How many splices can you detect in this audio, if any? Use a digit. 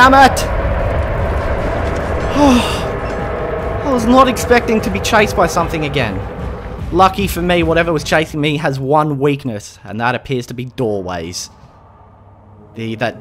1